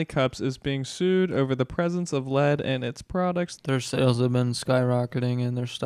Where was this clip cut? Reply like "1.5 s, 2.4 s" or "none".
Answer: 3.5 s